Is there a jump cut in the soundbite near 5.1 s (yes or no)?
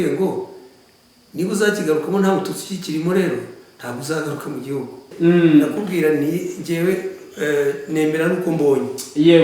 yes